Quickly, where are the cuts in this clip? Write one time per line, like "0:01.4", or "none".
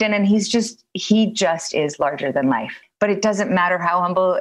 0:02.8